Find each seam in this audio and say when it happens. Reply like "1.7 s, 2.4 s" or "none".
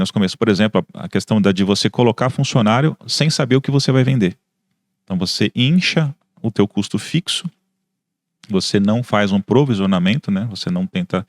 none